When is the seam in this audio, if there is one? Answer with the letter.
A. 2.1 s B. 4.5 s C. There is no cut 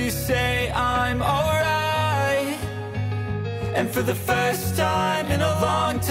C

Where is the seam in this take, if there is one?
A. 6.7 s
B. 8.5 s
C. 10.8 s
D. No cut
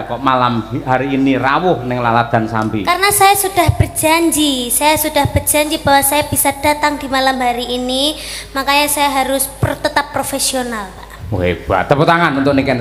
D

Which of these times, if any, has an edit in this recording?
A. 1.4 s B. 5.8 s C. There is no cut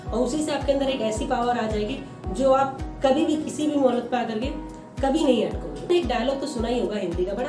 B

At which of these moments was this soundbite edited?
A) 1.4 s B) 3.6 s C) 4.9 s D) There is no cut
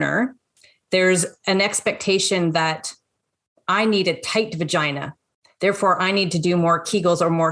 D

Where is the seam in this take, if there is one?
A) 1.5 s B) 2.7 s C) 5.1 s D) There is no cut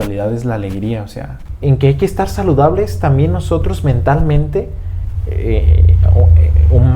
A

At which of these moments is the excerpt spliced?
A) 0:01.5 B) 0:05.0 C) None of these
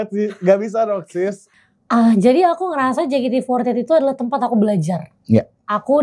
A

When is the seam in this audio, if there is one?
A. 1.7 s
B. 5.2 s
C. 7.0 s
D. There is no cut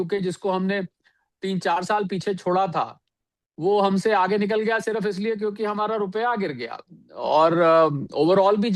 D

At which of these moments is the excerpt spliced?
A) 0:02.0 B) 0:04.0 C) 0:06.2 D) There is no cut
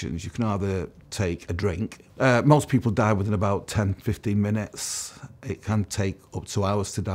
A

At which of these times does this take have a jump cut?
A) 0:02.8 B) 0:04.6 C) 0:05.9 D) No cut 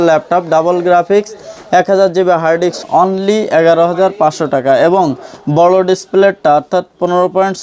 A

